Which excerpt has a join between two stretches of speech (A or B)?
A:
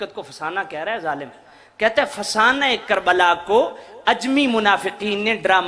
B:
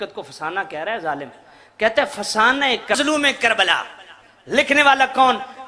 B